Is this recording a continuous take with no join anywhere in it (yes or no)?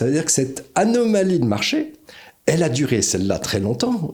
yes